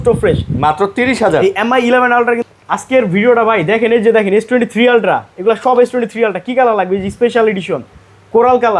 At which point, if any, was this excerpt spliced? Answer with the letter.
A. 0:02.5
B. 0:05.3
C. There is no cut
A